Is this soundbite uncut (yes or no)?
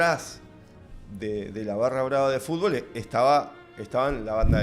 yes